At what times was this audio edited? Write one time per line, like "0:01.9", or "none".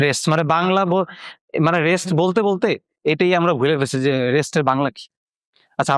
none